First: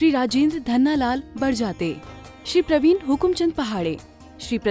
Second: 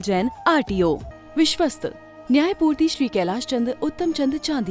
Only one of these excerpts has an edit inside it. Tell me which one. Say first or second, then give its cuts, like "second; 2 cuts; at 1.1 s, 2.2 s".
second; 1 cut; at 1.1 s